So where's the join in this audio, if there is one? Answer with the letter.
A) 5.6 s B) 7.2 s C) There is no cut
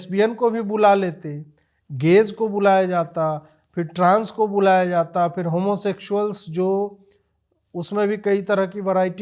C